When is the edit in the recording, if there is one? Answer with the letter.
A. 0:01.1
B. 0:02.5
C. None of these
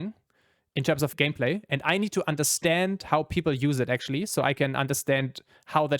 A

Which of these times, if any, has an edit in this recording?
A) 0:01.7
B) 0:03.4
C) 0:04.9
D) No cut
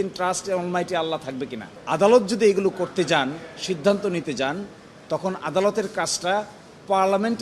A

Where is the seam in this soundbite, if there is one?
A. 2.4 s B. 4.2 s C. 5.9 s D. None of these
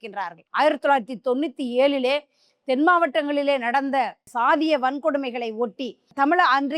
B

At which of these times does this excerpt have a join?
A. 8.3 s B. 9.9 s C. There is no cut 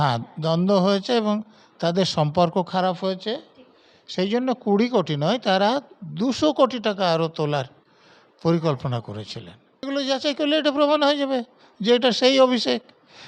B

